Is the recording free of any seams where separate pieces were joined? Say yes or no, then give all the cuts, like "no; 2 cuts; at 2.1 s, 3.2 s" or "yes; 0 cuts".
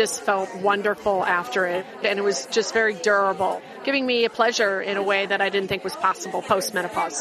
no; 1 cut; at 2.0 s